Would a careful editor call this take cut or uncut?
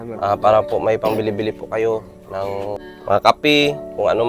cut